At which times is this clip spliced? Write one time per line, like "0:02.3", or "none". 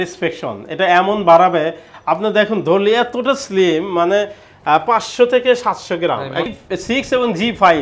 0:06.5